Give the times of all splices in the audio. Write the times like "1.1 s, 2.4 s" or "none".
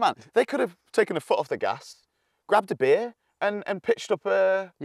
3.2 s

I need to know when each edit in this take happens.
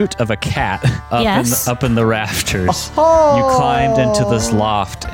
1.1 s

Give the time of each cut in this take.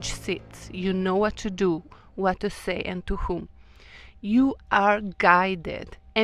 none

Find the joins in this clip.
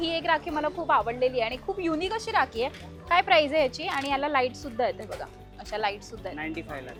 none

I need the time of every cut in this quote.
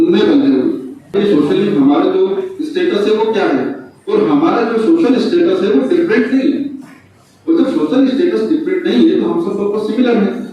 1.2 s

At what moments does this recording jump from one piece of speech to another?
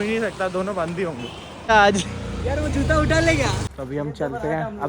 1.7 s, 3.7 s

